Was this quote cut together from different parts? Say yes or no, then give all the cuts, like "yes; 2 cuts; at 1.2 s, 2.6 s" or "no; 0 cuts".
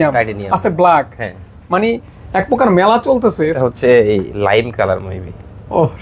yes; 1 cut; at 3.5 s